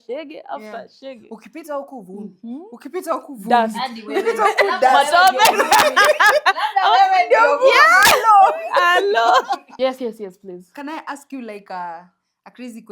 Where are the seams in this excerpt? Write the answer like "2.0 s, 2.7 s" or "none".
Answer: 9.7 s